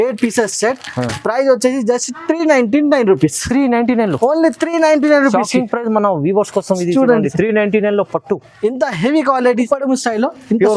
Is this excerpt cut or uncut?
cut